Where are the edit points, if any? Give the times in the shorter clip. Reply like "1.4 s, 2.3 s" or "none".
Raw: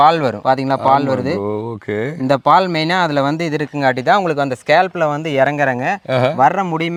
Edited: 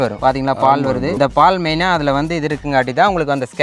1.2 s